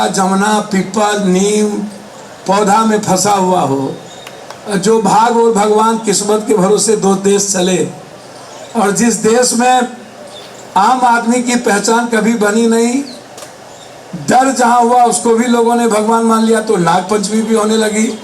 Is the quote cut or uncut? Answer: uncut